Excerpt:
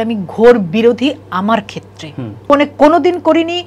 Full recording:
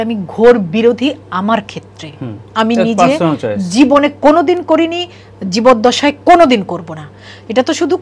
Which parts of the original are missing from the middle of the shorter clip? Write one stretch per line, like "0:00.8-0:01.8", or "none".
0:02.5-0:03.9